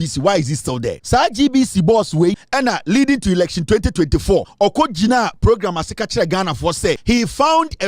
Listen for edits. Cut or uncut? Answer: cut